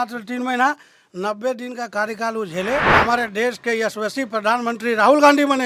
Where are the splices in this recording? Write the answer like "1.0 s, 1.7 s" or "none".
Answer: 2.9 s